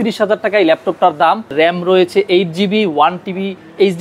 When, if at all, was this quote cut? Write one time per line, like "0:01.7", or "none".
0:01.5